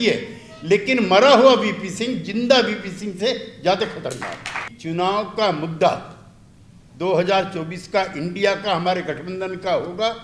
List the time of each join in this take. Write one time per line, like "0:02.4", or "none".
0:04.7